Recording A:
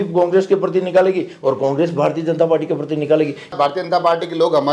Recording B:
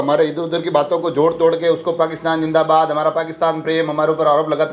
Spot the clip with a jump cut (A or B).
A